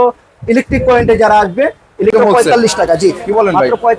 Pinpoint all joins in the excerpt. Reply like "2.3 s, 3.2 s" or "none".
2.1 s